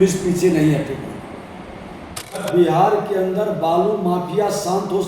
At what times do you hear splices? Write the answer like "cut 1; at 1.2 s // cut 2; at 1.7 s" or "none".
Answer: cut 1; at 2.4 s